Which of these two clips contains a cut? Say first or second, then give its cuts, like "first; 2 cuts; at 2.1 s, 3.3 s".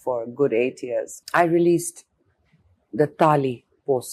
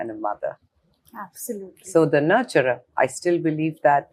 first; 1 cut; at 1.1 s